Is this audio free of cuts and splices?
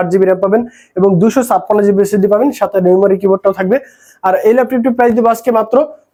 yes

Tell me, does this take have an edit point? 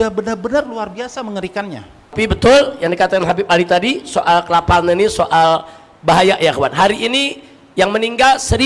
yes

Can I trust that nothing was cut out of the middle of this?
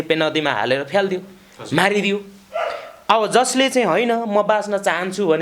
yes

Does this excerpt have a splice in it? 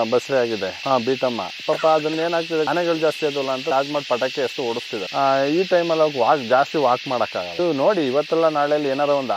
yes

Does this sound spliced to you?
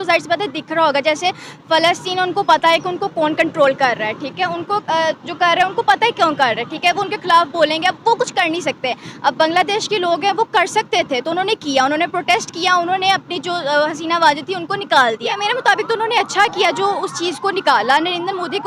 yes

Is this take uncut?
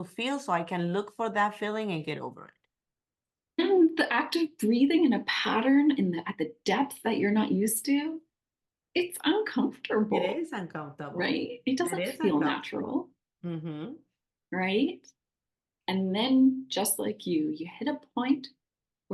no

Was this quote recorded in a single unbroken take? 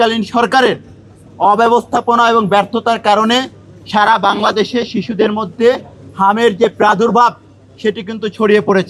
yes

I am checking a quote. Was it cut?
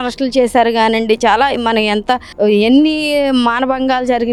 no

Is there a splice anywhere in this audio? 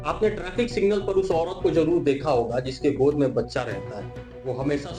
no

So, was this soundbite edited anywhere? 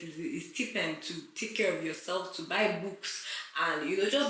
no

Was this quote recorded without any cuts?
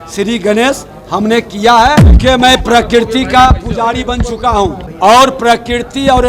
no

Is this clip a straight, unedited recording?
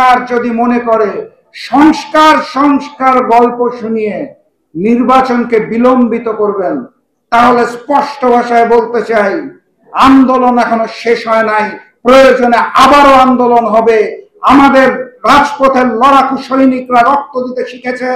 yes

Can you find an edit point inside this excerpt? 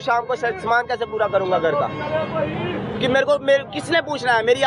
no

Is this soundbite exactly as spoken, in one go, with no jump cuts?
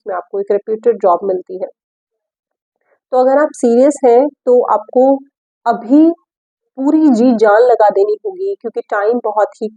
yes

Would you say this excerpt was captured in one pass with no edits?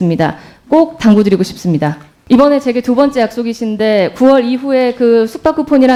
yes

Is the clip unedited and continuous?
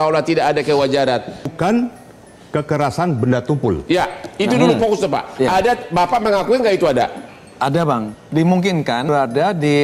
no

